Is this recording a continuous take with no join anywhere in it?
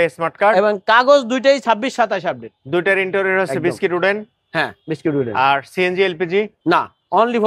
yes; 0 cuts

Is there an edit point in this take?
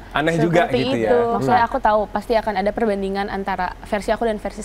yes; 1 cut; at 1.4 s

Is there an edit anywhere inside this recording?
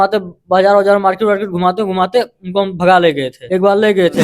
yes; 1 cut; at 3.3 s

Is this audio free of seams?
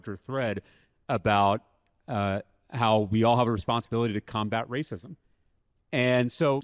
yes; 0 cuts

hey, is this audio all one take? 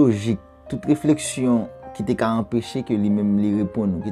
yes; 0 cuts

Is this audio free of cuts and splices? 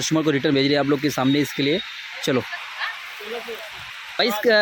yes; 0 cuts

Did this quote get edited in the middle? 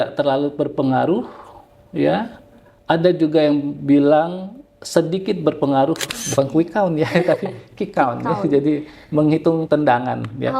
yes; 1 cut; at 6.1 s

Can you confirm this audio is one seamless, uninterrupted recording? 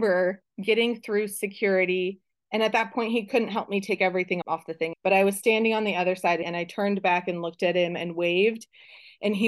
no; 2 cuts; at 4.4 s, 6.5 s

